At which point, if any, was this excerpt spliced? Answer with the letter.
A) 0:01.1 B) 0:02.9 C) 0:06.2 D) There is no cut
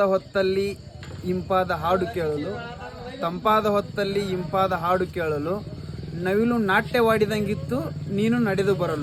D